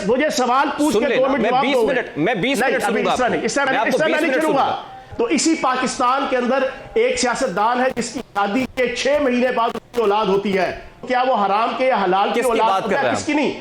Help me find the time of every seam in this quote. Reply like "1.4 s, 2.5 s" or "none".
5.0 s, 11.0 s